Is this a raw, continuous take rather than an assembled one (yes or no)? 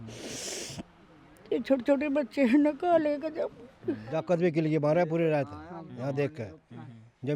no